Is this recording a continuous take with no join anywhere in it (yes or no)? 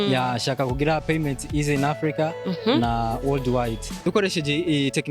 no